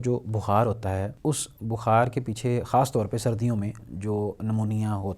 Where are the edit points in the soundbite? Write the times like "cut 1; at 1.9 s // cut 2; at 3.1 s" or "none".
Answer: cut 1; at 1.1 s